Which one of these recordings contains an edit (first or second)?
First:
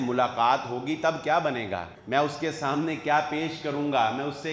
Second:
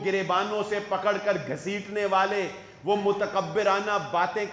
first